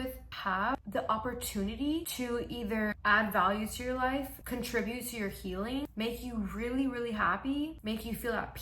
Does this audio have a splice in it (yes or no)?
yes